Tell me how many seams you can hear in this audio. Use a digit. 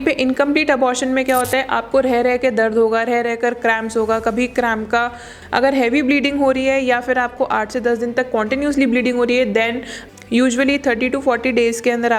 2